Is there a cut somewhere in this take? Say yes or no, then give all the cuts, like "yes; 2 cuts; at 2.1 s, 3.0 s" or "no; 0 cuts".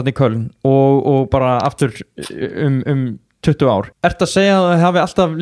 yes; 1 cut; at 3.9 s